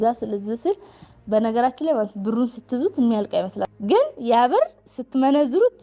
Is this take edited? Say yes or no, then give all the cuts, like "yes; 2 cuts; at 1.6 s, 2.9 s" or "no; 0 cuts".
yes; 1 cut; at 3.7 s